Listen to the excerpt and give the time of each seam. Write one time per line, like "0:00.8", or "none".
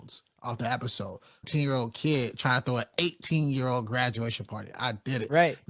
0:01.4